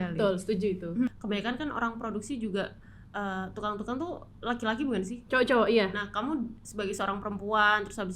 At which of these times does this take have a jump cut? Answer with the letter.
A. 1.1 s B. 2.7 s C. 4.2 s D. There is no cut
A